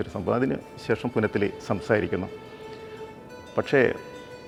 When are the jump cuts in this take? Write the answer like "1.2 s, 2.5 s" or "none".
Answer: none